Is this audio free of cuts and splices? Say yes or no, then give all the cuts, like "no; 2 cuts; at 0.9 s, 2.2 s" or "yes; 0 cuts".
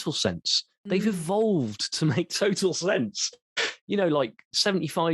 yes; 0 cuts